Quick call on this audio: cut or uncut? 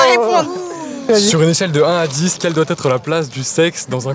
cut